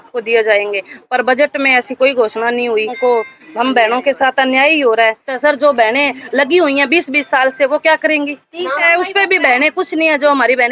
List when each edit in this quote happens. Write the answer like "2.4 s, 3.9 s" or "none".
2.9 s, 5.3 s, 8.8 s